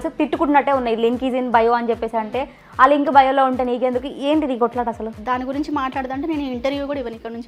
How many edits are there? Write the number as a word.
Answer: one